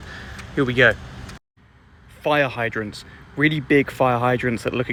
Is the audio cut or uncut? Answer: uncut